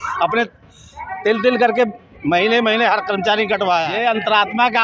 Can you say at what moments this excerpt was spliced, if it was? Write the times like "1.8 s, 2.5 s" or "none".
3.9 s